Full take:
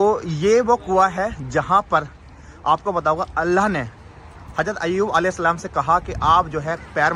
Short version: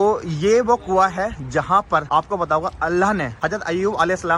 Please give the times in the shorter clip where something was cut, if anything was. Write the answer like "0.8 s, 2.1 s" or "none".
2.1 s, 3.3 s